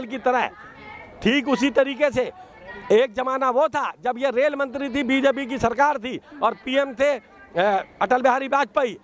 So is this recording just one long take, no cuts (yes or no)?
yes